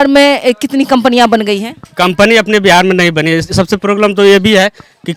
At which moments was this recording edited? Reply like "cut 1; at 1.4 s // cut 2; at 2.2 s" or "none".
none